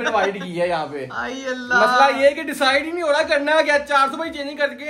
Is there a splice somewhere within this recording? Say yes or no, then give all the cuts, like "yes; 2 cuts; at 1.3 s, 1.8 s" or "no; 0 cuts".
no; 0 cuts